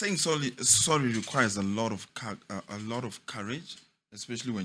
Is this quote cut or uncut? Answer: uncut